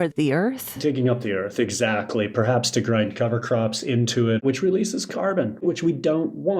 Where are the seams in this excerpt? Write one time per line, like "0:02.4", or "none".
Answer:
0:04.4
0:05.6